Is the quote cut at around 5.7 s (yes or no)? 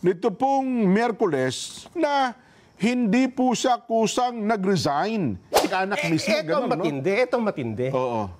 yes